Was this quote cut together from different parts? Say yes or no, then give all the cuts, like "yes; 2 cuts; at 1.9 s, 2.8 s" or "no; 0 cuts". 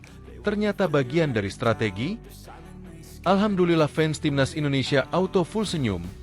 yes; 1 cut; at 2.6 s